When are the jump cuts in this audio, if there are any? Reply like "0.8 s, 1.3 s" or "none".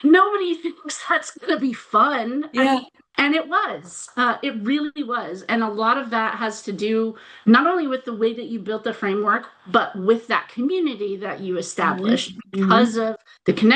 none

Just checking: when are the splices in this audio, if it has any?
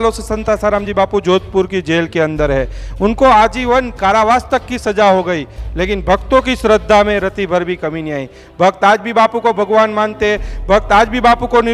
none

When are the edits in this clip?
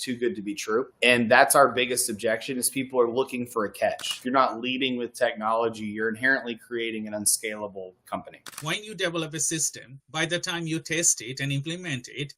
4.1 s, 8.5 s

